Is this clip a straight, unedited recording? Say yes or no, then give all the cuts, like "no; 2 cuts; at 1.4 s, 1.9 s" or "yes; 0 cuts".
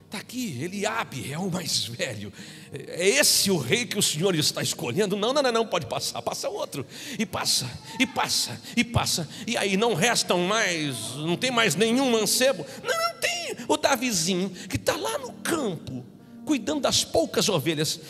yes; 0 cuts